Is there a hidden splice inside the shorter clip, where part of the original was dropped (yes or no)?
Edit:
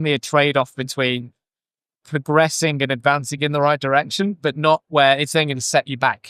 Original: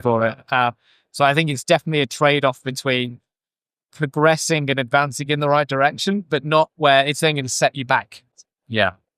no